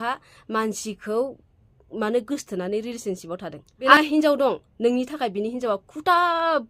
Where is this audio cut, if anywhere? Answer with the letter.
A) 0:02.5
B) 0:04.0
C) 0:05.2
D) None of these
B